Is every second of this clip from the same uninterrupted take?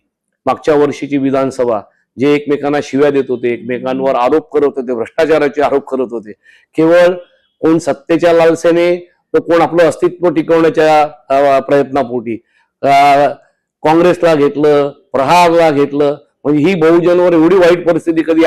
yes; 0 cuts

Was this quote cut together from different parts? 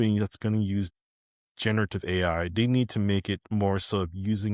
no; 0 cuts

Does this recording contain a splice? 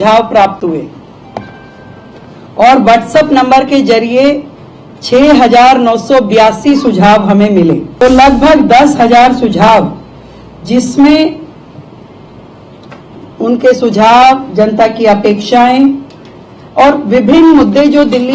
yes; 1 cut; at 7.9 s

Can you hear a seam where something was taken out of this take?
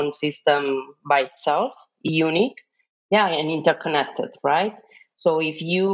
no; 0 cuts

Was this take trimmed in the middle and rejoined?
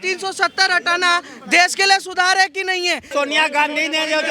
yes; 1 cut; at 3.1 s

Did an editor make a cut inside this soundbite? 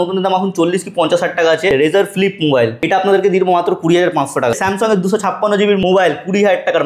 yes; 4 cuts; at 1.7 s, 2.8 s, 4.6 s, 5.8 s

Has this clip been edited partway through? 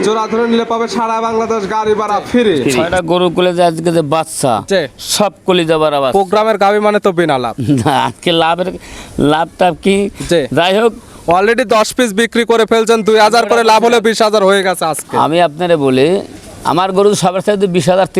yes; 1 cut; at 2.8 s

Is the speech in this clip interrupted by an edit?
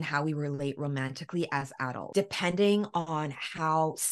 yes; 1 cut; at 2.0 s

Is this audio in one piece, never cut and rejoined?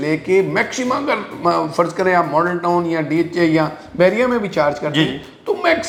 yes; 0 cuts

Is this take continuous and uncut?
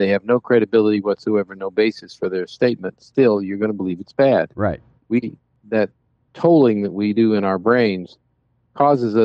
no; 1 cut; at 5.6 s

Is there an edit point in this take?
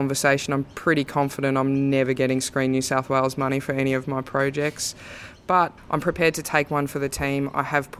yes; 1 cut; at 5.8 s

